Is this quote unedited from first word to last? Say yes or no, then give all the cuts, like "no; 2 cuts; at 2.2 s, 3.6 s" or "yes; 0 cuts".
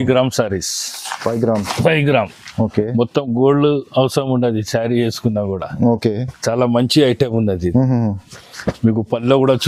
yes; 0 cuts